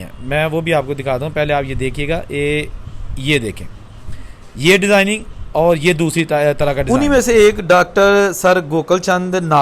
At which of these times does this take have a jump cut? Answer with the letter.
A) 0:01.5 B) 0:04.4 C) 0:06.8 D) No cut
C